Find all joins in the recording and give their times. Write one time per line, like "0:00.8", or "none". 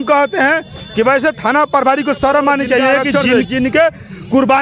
0:03.1

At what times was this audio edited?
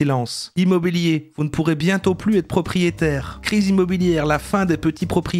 0:03.3

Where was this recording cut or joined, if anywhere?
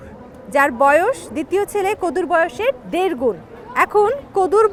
none

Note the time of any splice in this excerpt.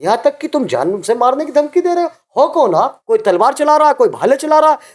0:03.0

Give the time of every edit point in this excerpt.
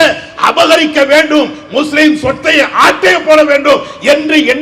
none

